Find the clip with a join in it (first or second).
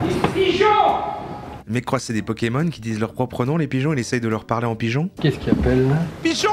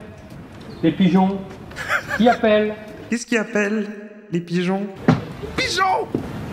second